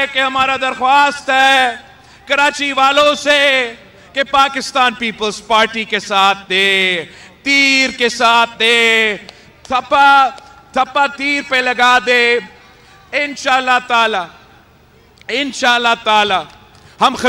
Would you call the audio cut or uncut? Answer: uncut